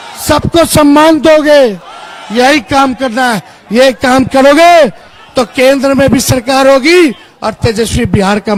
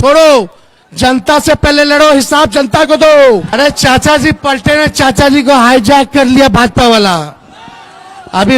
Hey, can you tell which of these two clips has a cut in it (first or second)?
second